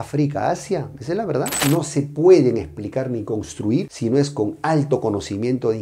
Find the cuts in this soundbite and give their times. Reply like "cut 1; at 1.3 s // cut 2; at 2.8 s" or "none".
cut 1; at 1.6 s